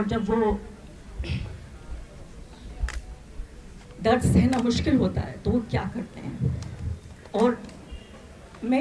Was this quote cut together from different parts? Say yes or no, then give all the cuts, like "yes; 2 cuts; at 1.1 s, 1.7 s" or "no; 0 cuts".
no; 0 cuts